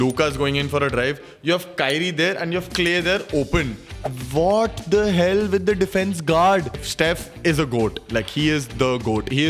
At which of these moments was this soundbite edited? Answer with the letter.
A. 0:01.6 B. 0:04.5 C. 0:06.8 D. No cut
C